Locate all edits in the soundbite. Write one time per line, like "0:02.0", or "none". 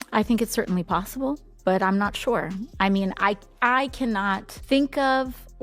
0:04.5